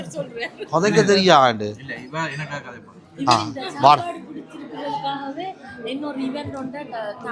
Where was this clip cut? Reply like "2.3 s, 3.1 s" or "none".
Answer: none